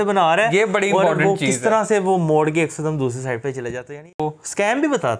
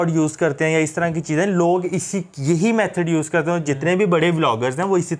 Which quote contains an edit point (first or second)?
first